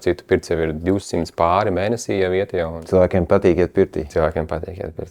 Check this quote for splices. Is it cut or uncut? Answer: cut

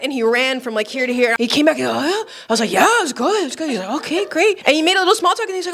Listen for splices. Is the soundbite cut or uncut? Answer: cut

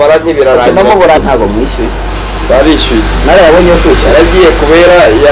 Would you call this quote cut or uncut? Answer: cut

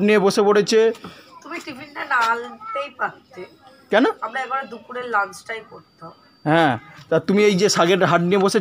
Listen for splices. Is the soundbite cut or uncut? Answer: uncut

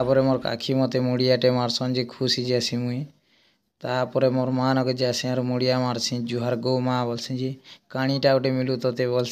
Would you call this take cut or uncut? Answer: uncut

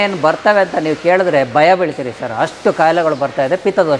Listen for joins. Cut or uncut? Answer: uncut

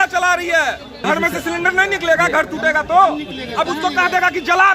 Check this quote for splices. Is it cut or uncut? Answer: cut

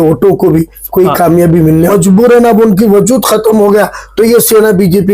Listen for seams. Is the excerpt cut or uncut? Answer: cut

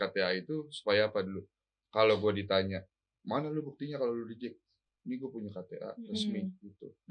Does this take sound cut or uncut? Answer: uncut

